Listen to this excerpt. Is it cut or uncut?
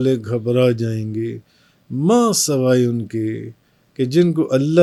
uncut